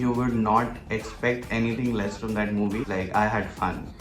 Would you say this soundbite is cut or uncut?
cut